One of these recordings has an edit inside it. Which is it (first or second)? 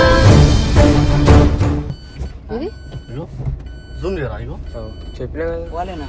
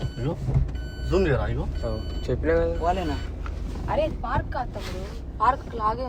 first